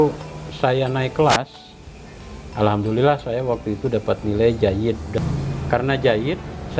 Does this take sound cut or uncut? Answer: cut